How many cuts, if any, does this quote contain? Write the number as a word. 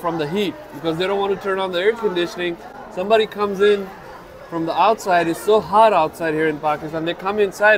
zero